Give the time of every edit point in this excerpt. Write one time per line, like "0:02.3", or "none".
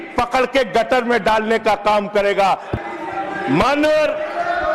0:02.7

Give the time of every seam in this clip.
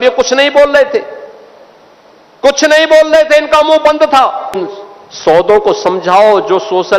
0:04.6

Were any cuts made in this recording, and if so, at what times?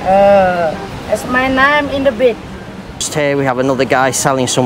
0:03.1

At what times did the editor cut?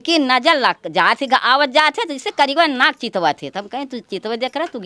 none

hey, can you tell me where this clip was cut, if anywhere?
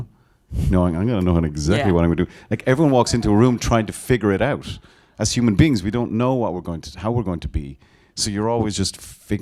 none

